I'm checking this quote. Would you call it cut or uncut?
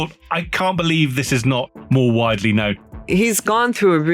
cut